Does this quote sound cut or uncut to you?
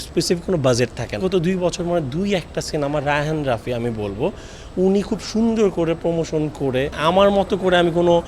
cut